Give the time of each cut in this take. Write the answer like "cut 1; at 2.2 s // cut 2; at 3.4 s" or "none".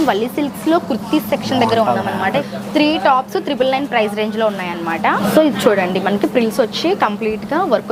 cut 1; at 2.5 s // cut 2; at 5.2 s